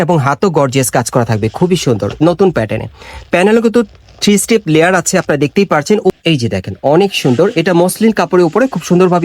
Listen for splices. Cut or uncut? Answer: cut